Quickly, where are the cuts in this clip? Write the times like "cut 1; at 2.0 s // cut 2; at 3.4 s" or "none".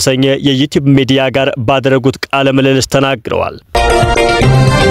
cut 1; at 3.8 s